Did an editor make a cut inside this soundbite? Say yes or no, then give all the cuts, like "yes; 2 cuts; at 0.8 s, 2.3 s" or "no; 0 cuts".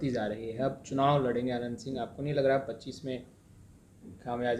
no; 0 cuts